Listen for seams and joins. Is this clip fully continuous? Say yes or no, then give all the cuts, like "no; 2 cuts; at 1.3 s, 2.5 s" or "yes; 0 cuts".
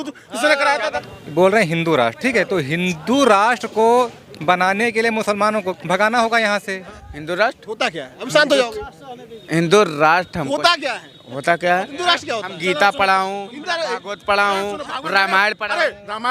no; 3 cuts; at 1.1 s, 6.9 s, 11.9 s